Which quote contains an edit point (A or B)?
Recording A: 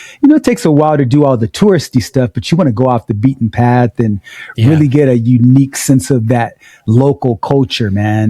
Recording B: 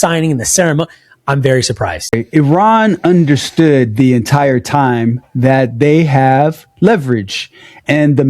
B